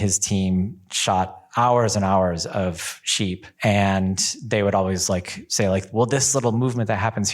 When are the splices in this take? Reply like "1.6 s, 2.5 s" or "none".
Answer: 3.5 s